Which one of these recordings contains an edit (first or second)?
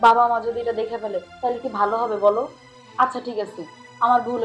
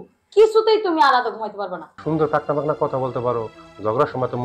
second